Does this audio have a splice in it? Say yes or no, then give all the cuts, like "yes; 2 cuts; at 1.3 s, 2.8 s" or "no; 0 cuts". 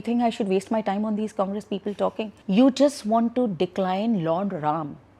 yes; 1 cut; at 2.4 s